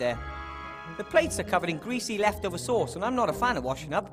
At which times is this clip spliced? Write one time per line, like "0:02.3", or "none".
none